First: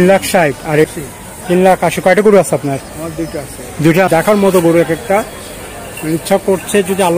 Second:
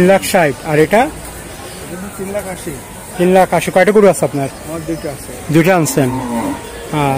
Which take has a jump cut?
first; 2 cuts; at 0.9 s, 4.1 s

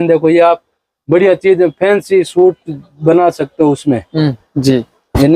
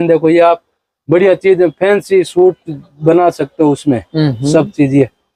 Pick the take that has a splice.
first; 1 cut; at 4.4 s

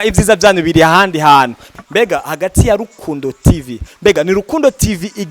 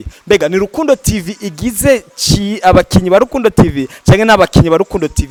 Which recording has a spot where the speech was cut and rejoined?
first; 1 cut; at 1.6 s

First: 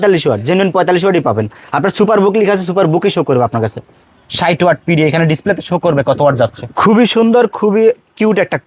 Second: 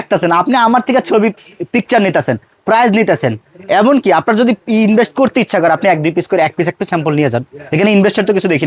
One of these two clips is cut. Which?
first; 2 cuts; at 3.9 s, 6.6 s

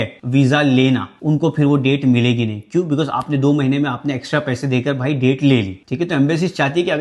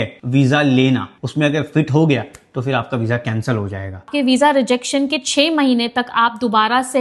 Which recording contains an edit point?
second; 2 cuts; at 1.1 s, 4.1 s

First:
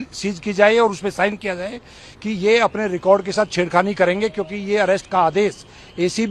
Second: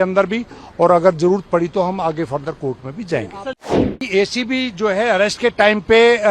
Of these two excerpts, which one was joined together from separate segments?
second; 1 cut; at 3.6 s

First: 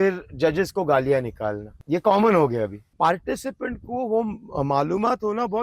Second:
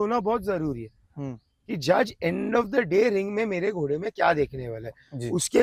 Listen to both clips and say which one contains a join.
first; 2 cuts; at 1.7 s, 2.8 s

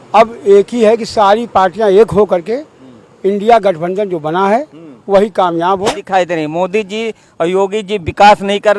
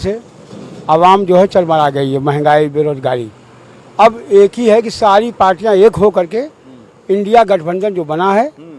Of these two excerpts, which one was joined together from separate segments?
first; 1 cut; at 6.0 s

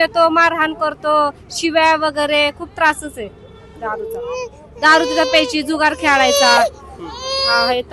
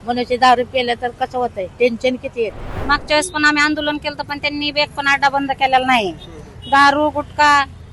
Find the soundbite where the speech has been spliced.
second; 1 cut; at 2.7 s

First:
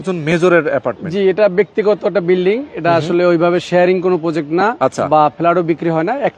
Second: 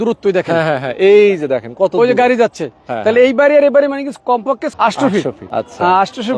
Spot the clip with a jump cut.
second; 2 cuts; at 4.7 s, 5.4 s

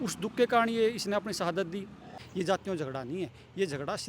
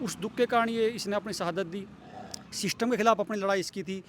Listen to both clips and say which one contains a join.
first; 1 cut; at 2.2 s

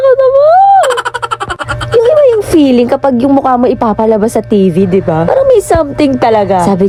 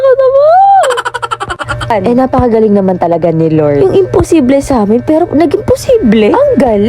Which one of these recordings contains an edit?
second; 1 cut; at 1.9 s

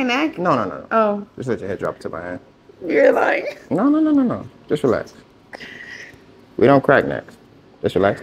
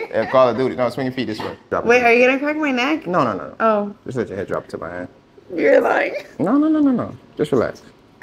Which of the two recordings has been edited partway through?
second; 1 cut; at 1.7 s

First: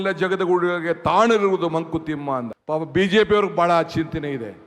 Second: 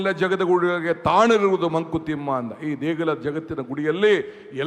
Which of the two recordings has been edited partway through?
first; 1 cut; at 2.5 s

